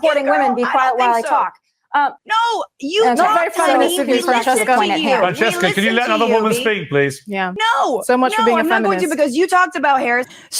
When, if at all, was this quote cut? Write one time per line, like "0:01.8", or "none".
0:02.2
0:07.5